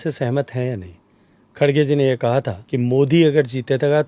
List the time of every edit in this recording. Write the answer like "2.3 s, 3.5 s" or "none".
2.6 s